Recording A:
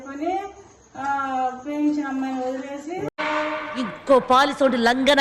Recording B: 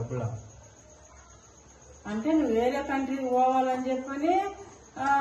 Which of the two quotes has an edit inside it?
A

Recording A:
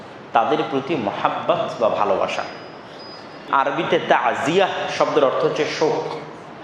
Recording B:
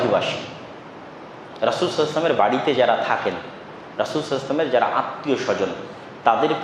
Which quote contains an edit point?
A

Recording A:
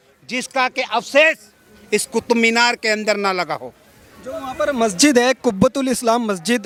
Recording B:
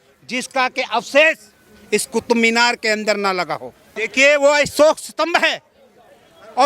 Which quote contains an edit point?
B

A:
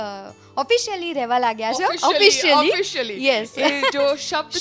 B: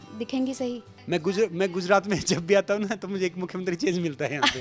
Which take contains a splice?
B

